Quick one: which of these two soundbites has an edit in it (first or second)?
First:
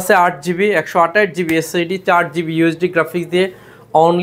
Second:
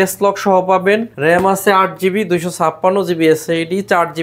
second